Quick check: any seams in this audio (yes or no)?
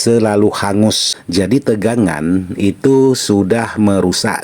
yes